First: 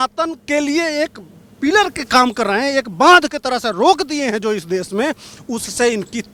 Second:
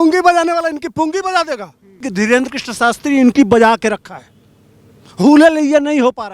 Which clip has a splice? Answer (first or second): second